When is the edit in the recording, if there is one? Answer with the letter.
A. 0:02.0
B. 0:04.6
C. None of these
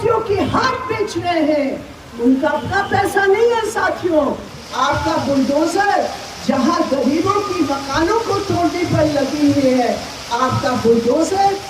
B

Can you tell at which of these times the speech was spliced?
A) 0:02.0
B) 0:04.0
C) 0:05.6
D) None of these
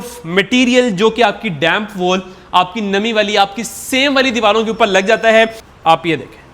C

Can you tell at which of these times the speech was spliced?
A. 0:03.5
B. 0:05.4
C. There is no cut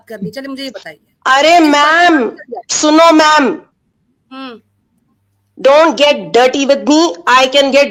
C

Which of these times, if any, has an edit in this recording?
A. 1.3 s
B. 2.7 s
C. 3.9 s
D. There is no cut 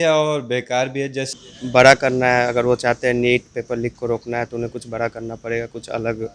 A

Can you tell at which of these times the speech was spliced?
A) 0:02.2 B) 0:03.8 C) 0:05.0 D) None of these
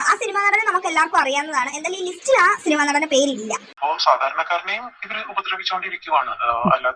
B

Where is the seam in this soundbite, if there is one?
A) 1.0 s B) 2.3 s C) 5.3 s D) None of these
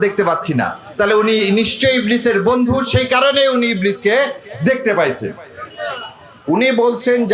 D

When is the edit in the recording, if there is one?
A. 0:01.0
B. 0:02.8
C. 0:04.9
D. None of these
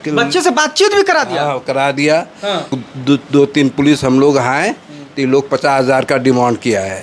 B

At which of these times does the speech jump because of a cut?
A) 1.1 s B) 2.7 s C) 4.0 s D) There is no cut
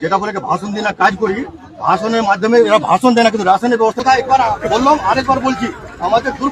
C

